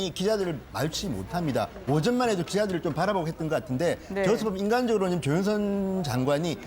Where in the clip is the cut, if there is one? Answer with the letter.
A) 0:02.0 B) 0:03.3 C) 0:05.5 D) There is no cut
C